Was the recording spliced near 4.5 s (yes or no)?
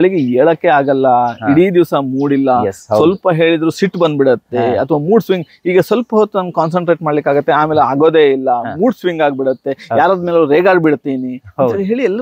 no